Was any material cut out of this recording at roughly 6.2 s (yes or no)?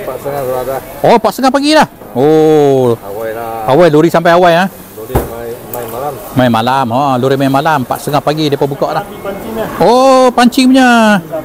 no